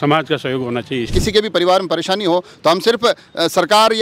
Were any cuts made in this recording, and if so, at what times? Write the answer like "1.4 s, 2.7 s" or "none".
1.1 s